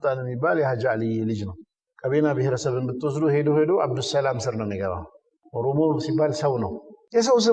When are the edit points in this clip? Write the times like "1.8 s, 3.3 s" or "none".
none